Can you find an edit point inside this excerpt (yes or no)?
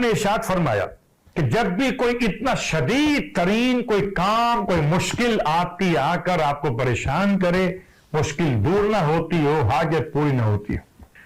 no